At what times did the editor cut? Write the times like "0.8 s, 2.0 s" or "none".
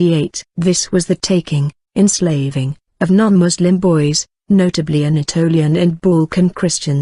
4.3 s